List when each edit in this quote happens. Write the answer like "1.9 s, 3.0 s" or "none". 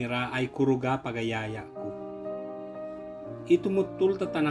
1.6 s, 3.4 s